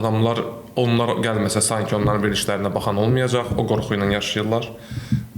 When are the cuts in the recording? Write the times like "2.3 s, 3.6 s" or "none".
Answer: none